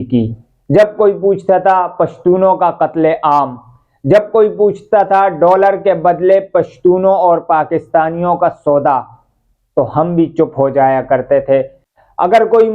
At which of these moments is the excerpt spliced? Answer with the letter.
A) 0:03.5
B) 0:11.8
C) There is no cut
B